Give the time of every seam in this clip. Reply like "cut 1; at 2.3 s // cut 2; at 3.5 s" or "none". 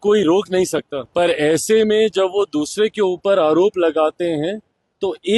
cut 1; at 1.0 s